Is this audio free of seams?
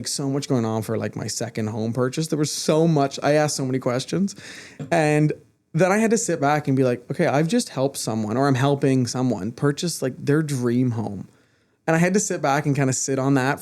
yes; 0 cuts

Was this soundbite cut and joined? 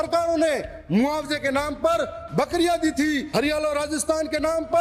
yes; 1 cut; at 3.3 s

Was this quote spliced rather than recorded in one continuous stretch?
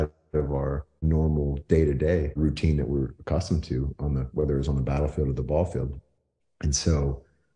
yes; 2 cuts; at 1.1 s, 2.3 s

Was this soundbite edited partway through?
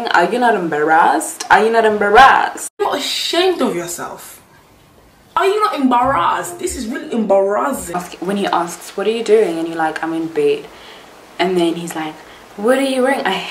yes; 2 cuts; at 2.9 s, 8.0 s

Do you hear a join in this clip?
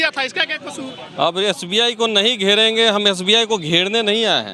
no; 0 cuts

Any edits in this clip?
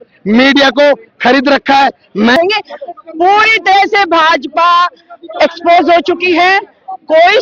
yes; 1 cut; at 2.4 s

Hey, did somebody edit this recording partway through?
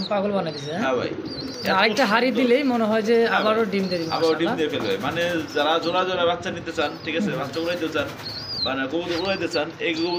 no; 0 cuts

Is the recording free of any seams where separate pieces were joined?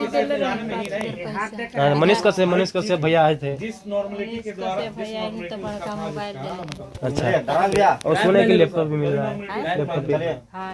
yes; 0 cuts

